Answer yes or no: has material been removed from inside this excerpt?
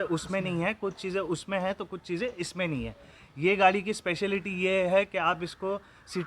no